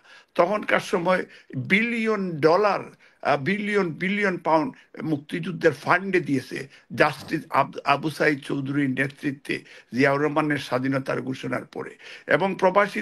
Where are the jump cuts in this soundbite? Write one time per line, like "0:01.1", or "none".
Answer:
none